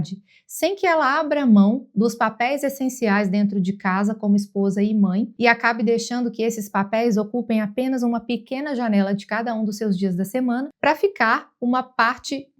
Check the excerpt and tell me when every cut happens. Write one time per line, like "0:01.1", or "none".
0:05.3
0:10.7